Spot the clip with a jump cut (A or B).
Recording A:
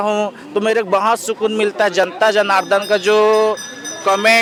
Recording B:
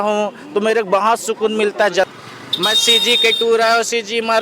B